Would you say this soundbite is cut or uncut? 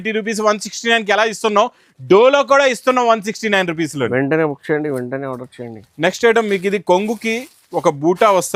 uncut